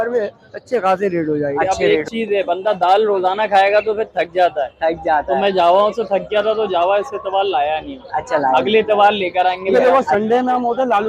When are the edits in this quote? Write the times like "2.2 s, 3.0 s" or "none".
1.7 s, 9.7 s